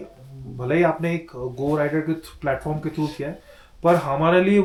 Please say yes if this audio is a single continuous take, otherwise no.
yes